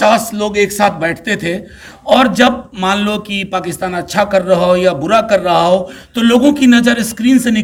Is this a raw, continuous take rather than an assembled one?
yes; 0 cuts

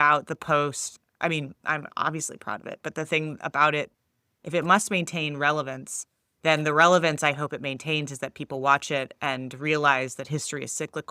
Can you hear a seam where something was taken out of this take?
yes; 2 cuts; at 0.9 s, 3.9 s

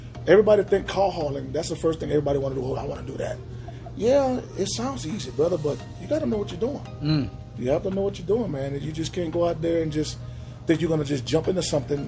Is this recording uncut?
yes; 0 cuts

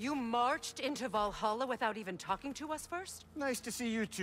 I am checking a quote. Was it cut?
no; 0 cuts

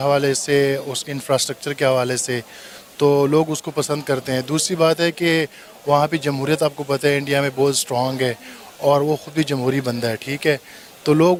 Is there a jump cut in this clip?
no; 0 cuts

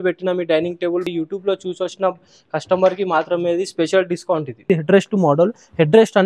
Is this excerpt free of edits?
no; 2 cuts; at 1.1 s, 4.6 s

